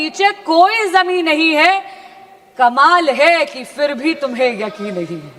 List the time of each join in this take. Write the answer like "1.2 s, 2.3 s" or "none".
none